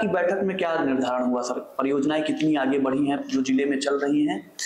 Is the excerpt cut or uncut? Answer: uncut